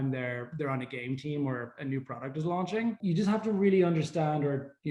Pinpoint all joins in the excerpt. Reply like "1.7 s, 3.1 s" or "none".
3.0 s